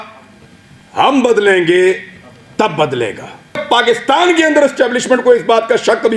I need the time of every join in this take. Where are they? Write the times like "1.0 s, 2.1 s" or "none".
3.6 s